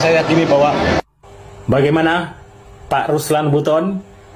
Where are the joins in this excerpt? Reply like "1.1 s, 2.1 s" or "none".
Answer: none